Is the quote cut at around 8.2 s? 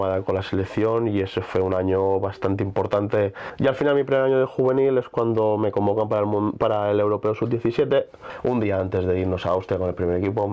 yes; 2 cuts; at 3.4 s, 8.2 s

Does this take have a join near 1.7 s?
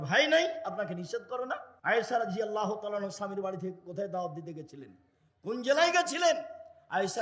yes; 1 cut; at 1.7 s

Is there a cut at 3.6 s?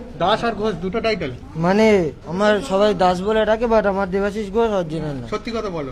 no; 0 cuts

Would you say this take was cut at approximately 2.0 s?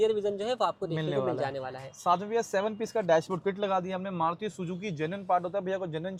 no; 0 cuts

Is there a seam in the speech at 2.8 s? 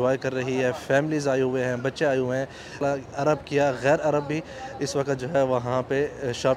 yes; 1 cut; at 2.8 s

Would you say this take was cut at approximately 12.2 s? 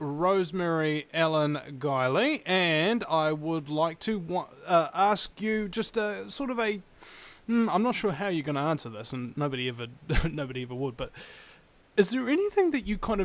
yes; 1 cut; at 12.2 s

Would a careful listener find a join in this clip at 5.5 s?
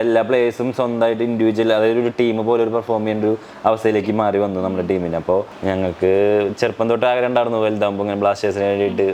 yes; 1 cut; at 5.5 s

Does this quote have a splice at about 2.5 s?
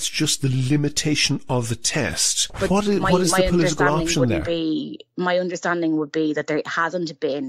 yes; 1 cut; at 2.5 s

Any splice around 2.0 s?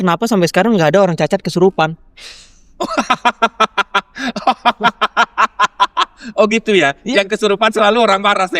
no; 0 cuts

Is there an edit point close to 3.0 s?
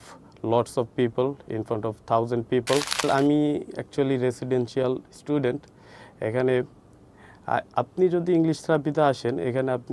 yes; 1 cut; at 3.0 s

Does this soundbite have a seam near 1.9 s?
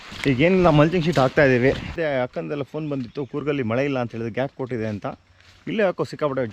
yes; 1 cut; at 1.9 s

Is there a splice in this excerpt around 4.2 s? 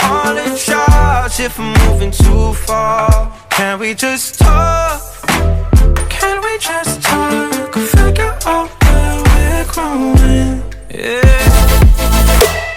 no; 1 cut; at 11.5 s

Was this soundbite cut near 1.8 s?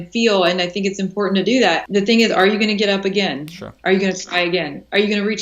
yes; 1 cut; at 1.8 s

